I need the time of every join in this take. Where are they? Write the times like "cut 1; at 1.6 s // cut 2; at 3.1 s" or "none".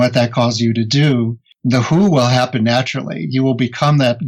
cut 1; at 1.4 s